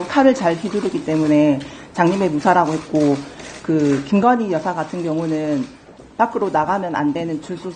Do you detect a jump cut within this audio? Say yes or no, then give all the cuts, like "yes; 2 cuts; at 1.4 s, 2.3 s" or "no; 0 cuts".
no; 0 cuts